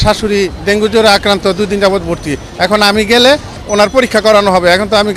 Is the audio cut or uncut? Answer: uncut